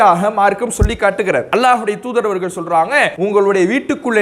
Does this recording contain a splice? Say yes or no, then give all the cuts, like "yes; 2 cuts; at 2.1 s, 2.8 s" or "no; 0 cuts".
yes; 2 cuts; at 1.5 s, 3.1 s